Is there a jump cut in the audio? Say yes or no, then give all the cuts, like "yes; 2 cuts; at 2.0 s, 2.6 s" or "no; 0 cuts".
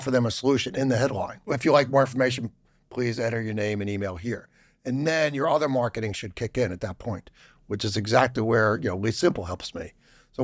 yes; 1 cut; at 1.4 s